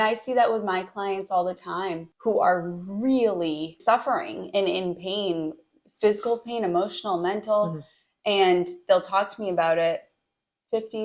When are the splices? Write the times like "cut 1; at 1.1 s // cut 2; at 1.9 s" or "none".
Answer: cut 1; at 2.1 s // cut 2; at 3.8 s